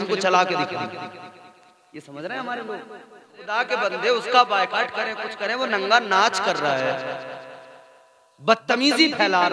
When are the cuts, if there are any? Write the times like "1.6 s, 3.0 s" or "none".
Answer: 3.5 s